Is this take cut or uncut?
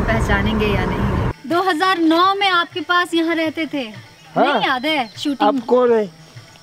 cut